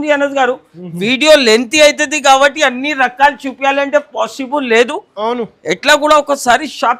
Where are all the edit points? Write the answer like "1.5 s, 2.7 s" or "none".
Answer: none